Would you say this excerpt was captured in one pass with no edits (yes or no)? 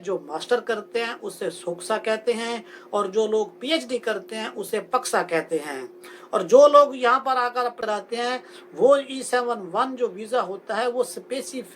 no